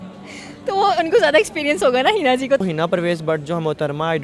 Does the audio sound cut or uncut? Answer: cut